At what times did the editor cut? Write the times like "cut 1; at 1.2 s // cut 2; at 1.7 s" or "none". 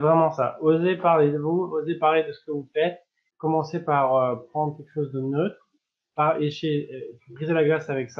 cut 1; at 3.3 s

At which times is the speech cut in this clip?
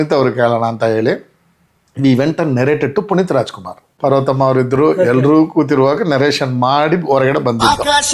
none

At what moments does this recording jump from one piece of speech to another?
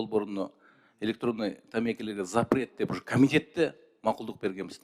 none

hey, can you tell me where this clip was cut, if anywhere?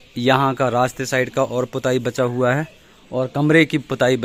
none

